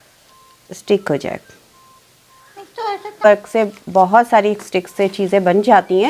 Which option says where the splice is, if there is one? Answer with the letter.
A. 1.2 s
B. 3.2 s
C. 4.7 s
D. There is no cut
B